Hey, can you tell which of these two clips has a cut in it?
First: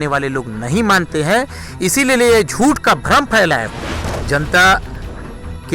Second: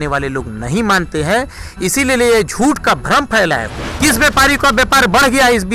first; 1 cut; at 3.8 s

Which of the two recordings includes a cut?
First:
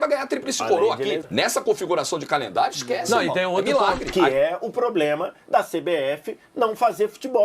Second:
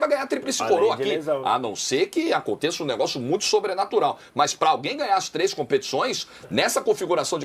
first; 2 cuts; at 1.2 s, 4.0 s

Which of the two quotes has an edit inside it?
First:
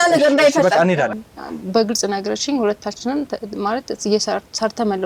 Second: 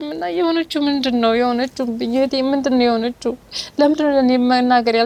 first; 1 cut; at 1.1 s

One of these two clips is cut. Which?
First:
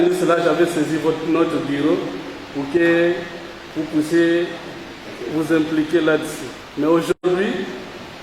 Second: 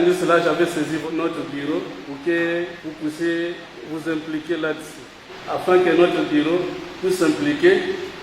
second; 6 cuts; at 1.0 s, 2.0 s, 2.8 s, 3.7 s, 5.3 s, 6.8 s

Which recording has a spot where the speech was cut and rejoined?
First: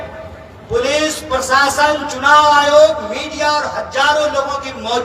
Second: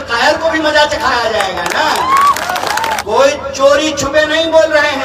second; 1 cut; at 3.0 s

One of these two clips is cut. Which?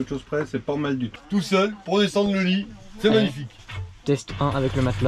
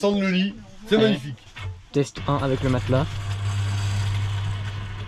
first; 1 cut; at 1.2 s

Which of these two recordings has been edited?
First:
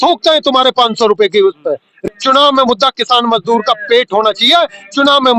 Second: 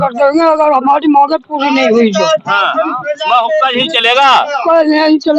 first; 1 cut; at 2.0 s

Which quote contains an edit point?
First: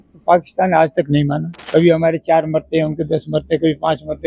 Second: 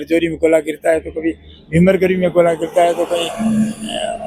first; 1 cut; at 1.5 s

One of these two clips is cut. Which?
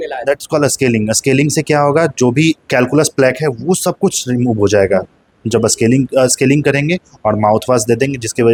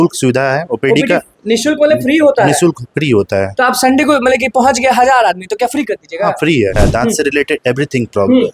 second; 1 cut; at 6.8 s

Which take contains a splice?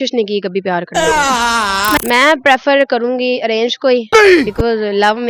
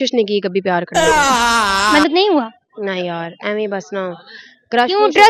first; 1 cut; at 2.0 s

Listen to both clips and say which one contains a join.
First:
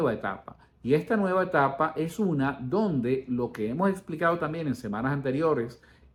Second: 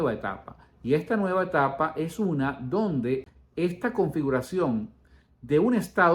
second; 1 cut; at 3.2 s

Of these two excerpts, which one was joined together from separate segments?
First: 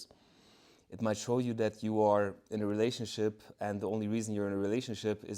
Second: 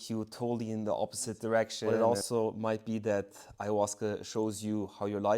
second; 1 cut; at 1.8 s

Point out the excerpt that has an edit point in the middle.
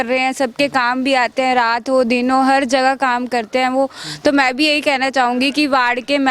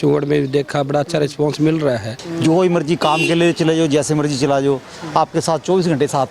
second; 1 cut; at 2.2 s

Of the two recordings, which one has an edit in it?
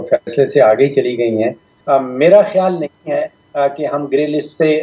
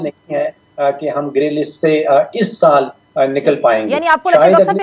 first; 1 cut; at 1.7 s

